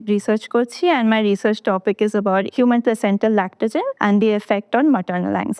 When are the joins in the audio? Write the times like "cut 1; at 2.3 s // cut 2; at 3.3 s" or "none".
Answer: cut 1; at 2.5 s // cut 2; at 3.9 s